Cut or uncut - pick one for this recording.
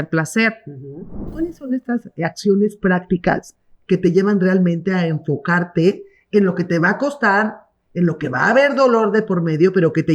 cut